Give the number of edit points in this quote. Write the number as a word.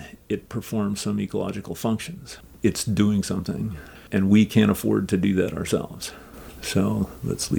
two